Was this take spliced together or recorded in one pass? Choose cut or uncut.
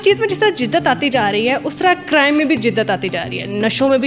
uncut